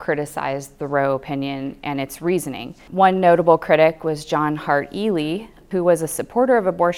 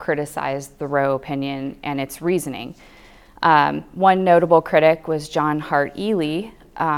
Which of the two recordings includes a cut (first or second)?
first